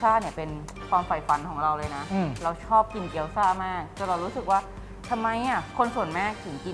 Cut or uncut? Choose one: uncut